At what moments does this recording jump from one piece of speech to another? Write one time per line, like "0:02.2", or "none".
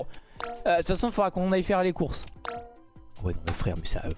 none